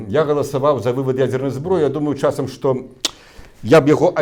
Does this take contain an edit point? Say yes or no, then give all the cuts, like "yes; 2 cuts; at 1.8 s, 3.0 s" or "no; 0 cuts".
no; 0 cuts